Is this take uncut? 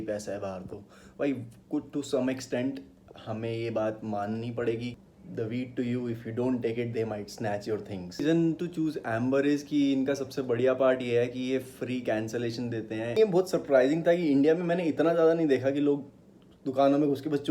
no; 3 cuts; at 5.0 s, 8.2 s, 13.2 s

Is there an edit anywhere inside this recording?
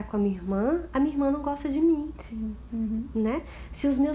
no; 0 cuts

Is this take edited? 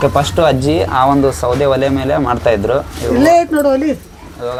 no; 0 cuts

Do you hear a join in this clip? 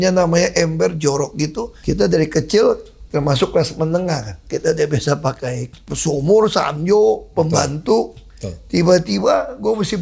yes; 3 cuts; at 1.7 s, 4.5 s, 5.9 s

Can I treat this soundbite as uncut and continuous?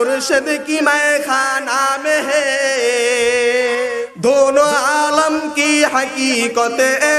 no; 1 cut; at 3.9 s

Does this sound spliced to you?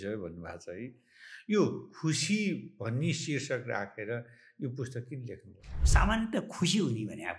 yes; 1 cut; at 5.7 s

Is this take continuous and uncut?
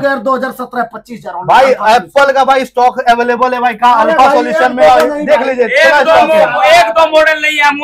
yes; 0 cuts

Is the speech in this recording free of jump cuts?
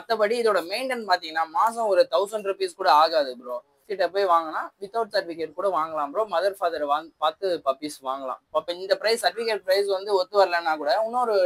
no; 2 cuts; at 3.9 s, 8.7 s

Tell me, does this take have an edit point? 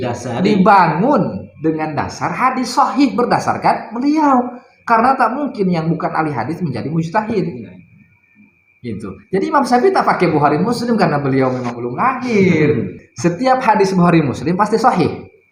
yes; 1 cut; at 13.0 s

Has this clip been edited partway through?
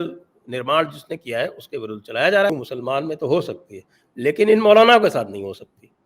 yes; 1 cut; at 2.5 s

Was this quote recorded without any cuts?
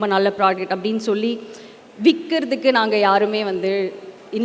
yes; 0 cuts

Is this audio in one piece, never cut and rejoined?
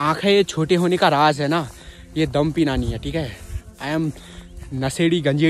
yes; 0 cuts

